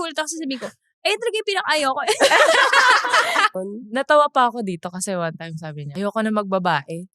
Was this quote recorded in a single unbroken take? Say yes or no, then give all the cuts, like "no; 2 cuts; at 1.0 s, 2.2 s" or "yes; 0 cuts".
no; 2 cuts; at 3.5 s, 5.8 s